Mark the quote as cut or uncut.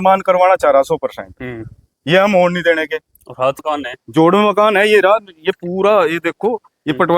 cut